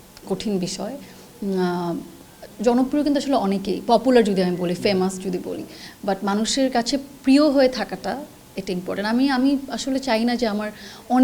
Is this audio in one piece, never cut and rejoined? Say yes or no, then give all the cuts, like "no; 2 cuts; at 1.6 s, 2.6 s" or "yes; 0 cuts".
yes; 0 cuts